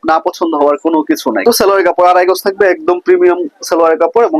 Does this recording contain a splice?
yes; 1 cut; at 1.4 s

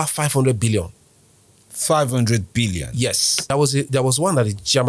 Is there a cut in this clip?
yes; 1 cut; at 3.3 s

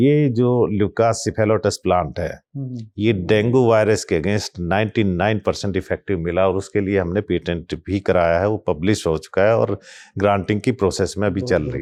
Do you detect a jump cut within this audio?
no; 0 cuts

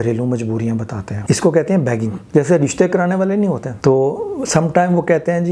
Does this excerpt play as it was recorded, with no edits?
no; 3 cuts; at 1.1 s, 2.2 s, 3.7 s

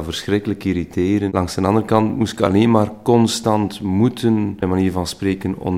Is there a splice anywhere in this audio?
yes; 1 cut; at 1.3 s

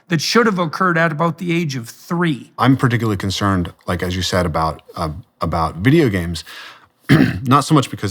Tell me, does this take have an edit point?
yes; 1 cut; at 2.5 s

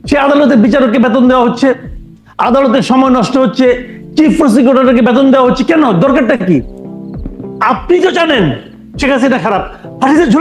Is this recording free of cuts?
yes; 0 cuts

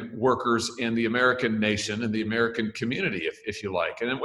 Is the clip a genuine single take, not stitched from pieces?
yes; 0 cuts

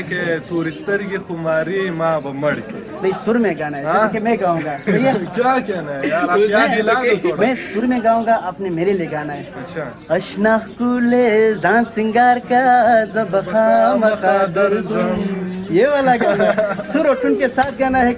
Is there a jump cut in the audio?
no; 0 cuts

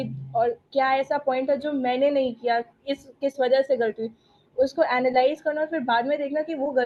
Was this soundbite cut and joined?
no; 0 cuts

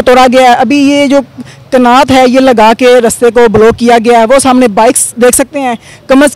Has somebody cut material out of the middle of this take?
no; 0 cuts

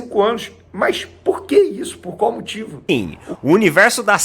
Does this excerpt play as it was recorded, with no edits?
no; 1 cut; at 2.8 s

